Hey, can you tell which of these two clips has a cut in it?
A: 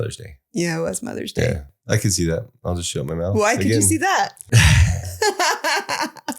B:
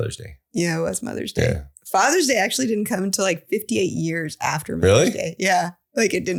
A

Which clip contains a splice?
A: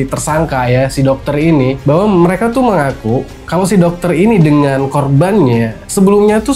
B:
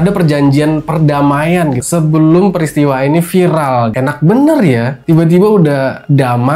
B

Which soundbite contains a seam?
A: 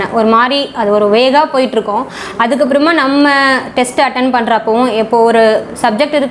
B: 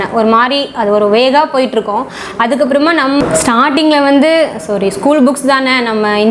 B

